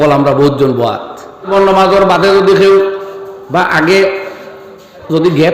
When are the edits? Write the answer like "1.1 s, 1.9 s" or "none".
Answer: 1.5 s